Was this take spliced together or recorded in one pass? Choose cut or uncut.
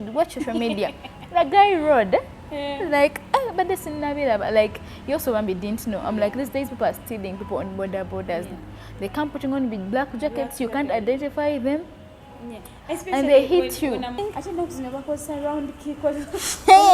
cut